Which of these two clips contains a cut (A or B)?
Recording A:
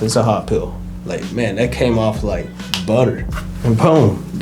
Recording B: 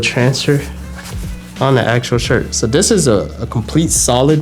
A